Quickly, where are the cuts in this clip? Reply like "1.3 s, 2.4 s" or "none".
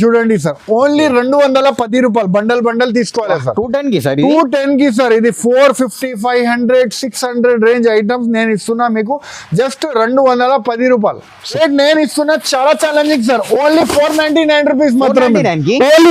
11.6 s